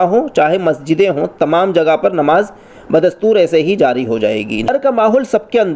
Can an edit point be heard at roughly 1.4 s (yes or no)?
no